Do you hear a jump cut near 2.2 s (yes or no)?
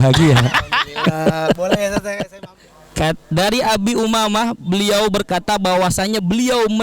yes